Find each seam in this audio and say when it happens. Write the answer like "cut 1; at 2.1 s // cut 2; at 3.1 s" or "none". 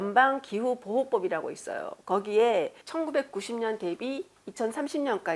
cut 1; at 2.8 s